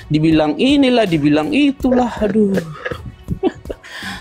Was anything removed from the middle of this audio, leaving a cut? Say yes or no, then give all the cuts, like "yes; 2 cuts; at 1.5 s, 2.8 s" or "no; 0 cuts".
no; 0 cuts